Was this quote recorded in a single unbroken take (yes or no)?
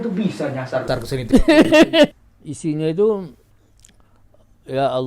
no